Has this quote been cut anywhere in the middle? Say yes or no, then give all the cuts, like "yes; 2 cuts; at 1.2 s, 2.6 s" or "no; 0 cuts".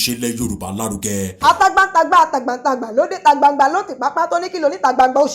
no; 0 cuts